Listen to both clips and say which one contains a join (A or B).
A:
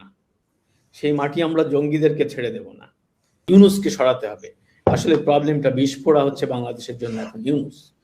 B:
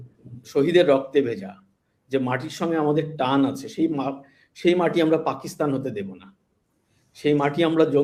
A